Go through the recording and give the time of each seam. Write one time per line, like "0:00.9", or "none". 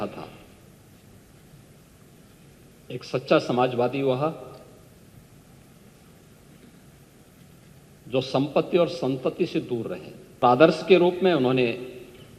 0:10.4